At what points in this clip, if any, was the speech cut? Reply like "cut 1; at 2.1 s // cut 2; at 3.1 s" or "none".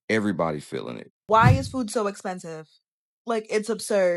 cut 1; at 0.9 s